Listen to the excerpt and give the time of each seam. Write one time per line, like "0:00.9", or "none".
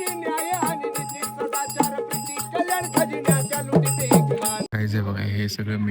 0:04.6